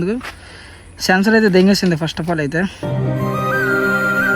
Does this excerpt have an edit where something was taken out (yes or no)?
yes